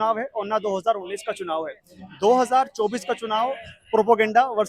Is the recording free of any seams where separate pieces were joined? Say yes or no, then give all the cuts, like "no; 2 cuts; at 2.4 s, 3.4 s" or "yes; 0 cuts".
yes; 0 cuts